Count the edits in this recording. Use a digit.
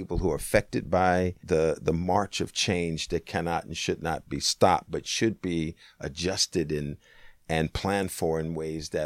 1